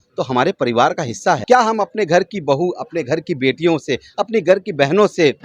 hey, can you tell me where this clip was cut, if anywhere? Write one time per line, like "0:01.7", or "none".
0:01.4